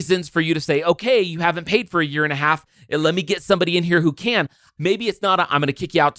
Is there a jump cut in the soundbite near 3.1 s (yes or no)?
yes